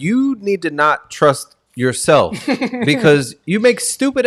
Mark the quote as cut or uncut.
uncut